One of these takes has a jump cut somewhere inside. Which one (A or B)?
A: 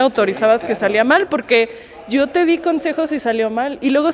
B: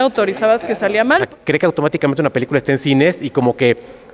B